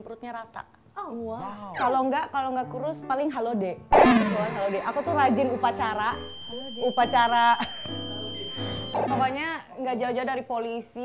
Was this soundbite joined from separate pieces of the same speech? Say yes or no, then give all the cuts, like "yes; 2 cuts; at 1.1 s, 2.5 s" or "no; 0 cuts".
yes; 2 cuts; at 1.6 s, 9.1 s